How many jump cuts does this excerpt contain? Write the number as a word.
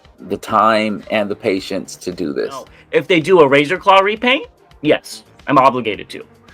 one